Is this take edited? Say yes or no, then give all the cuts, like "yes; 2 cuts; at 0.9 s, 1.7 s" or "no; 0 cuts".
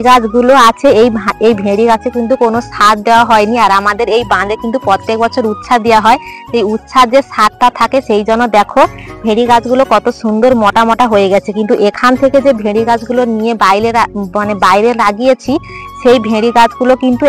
no; 0 cuts